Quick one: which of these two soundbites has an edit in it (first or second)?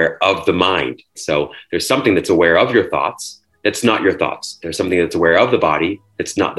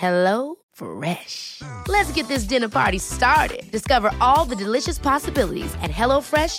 first